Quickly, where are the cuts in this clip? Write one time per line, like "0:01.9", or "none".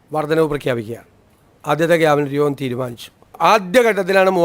0:03.4

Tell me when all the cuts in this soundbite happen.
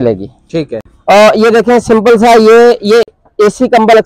none

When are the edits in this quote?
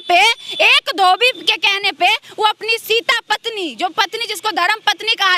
none

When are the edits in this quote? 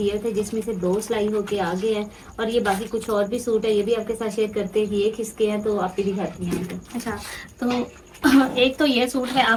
none

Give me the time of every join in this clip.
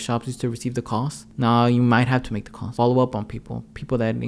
0:01.3
0:02.7

